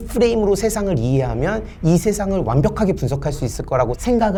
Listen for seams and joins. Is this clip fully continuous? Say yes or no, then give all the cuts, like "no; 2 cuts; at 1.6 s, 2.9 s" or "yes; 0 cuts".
yes; 0 cuts